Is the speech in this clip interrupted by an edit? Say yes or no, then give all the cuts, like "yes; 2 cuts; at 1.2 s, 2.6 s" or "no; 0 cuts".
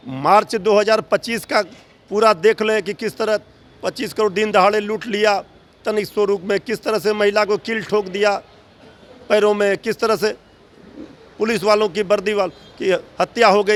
no; 0 cuts